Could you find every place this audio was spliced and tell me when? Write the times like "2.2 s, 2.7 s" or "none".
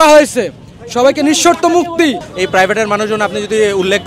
2.3 s